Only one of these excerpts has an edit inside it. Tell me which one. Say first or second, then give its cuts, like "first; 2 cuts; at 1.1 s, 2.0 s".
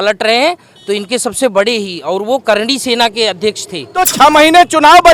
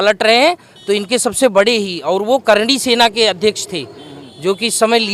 first; 1 cut; at 4.0 s